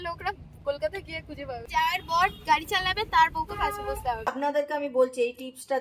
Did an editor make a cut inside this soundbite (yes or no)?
yes